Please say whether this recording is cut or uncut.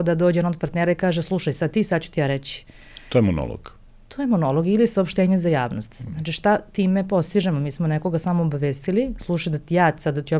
uncut